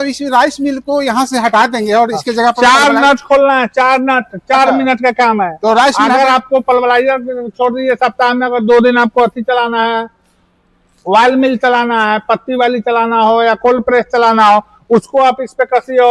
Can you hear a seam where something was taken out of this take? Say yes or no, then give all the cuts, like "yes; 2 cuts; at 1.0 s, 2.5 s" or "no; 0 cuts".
no; 0 cuts